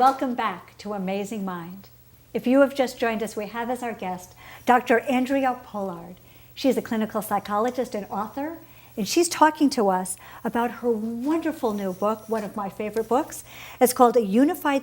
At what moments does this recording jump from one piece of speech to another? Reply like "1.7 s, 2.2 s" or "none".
2.4 s